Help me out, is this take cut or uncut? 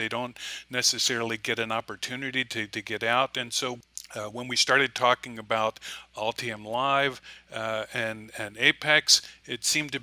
cut